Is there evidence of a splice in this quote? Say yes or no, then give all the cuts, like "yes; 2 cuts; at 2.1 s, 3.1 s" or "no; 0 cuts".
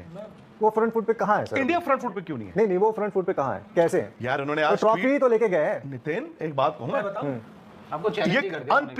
no; 0 cuts